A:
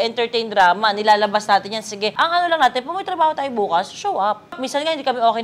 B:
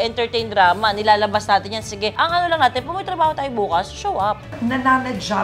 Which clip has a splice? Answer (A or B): B